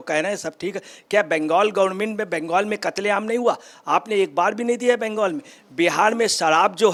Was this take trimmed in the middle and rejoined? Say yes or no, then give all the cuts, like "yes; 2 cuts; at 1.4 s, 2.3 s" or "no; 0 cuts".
no; 0 cuts